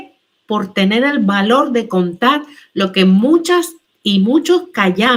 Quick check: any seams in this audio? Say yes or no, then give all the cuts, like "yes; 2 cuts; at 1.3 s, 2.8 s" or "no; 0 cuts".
no; 0 cuts